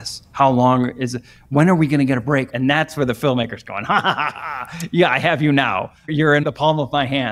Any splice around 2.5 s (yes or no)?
yes